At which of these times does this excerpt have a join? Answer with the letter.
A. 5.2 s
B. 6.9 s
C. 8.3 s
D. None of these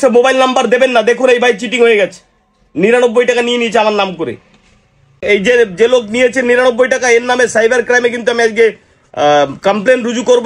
A